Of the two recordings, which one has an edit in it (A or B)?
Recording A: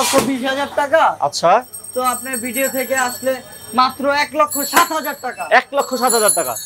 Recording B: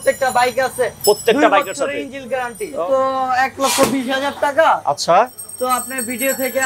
B